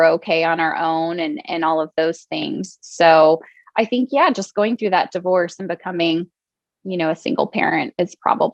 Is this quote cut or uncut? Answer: uncut